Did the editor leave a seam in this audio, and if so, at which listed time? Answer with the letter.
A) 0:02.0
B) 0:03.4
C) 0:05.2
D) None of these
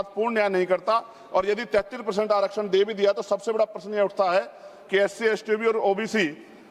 D